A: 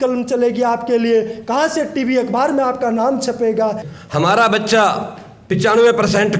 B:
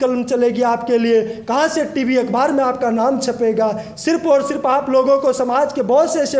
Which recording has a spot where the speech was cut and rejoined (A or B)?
A